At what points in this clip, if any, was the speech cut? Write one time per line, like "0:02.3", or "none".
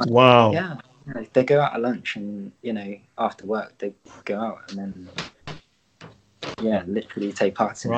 none